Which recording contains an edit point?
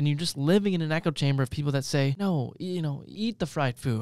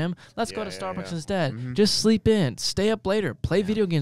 first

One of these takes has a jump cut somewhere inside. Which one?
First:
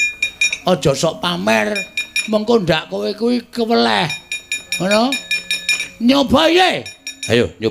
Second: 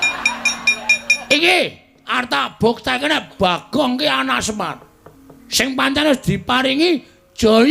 second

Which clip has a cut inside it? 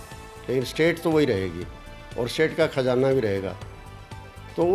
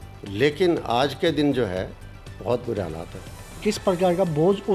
second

